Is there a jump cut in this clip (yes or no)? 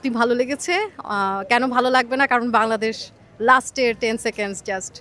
no